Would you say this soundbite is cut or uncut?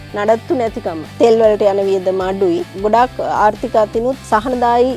cut